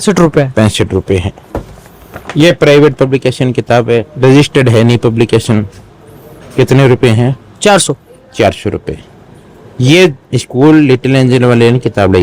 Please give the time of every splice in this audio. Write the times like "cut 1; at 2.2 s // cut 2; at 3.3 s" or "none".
none